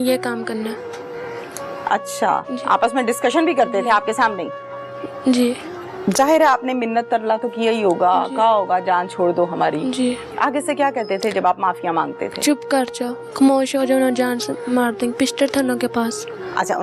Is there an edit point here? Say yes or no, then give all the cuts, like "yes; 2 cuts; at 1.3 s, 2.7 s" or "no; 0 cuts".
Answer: no; 0 cuts